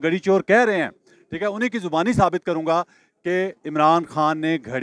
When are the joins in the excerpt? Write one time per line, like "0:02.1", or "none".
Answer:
none